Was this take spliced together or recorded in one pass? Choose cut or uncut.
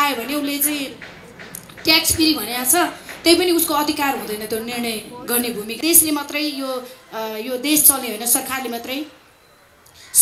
cut